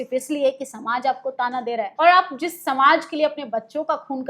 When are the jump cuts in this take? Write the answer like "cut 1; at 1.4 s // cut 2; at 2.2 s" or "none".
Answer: cut 1; at 1.9 s